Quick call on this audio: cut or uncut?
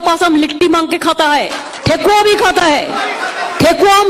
cut